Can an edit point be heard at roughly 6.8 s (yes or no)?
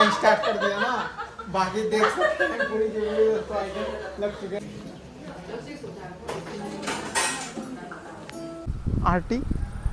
no